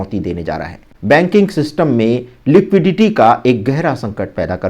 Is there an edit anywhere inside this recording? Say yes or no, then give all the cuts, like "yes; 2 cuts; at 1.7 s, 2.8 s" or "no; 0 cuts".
yes; 1 cut; at 0.9 s